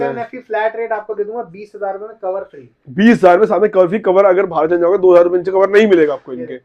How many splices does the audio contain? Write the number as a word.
zero